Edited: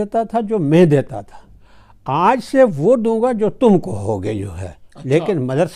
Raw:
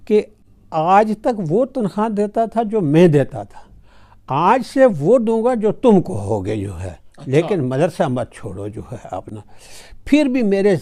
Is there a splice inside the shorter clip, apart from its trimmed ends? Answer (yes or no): no